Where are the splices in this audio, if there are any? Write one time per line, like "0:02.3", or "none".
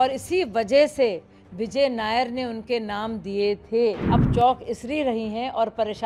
0:04.0